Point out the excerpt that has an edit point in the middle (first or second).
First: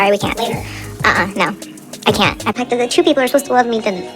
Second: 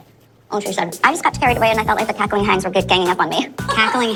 first